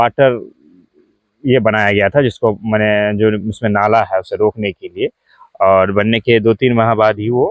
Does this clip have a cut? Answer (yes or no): no